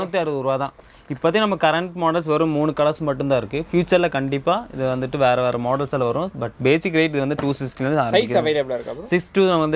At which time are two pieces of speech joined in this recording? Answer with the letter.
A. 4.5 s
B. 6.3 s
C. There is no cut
C